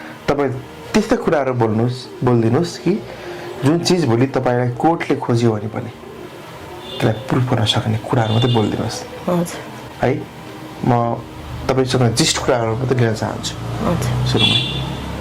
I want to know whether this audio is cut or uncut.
uncut